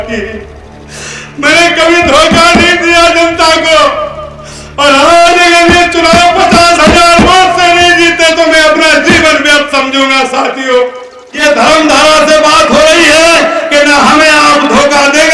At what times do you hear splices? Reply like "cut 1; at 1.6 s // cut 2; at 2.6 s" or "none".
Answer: cut 1; at 11.2 s